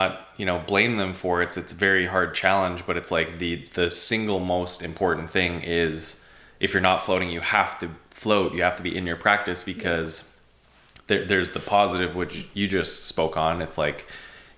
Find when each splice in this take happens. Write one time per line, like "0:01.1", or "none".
none